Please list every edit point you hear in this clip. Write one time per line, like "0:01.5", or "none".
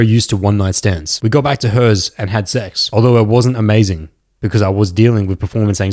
0:01.1
0:02.8